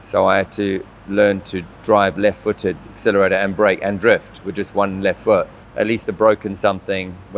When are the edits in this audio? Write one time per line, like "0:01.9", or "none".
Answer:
0:05.6